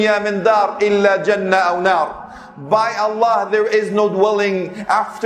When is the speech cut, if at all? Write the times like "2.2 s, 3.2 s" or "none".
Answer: none